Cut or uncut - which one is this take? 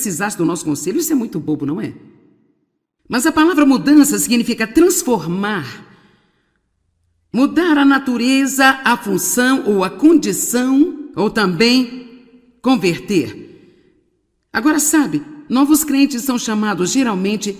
uncut